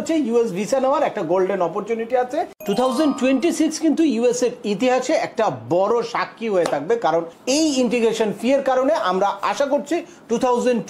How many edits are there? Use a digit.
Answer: 2